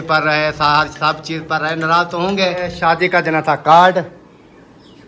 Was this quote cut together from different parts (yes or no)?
yes